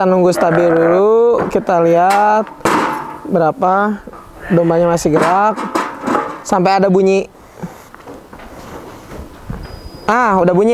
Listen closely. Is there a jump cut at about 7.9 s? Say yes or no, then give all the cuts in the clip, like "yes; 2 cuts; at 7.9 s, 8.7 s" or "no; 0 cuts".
no; 0 cuts